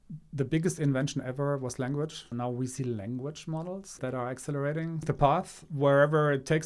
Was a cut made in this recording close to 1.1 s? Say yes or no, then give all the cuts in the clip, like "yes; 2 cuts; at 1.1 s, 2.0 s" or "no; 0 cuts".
no; 3 cuts; at 2.3 s, 4.0 s, 5.0 s